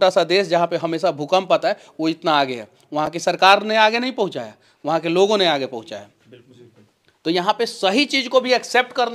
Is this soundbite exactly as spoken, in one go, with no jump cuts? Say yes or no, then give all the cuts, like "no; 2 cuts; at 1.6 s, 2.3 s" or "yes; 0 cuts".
yes; 0 cuts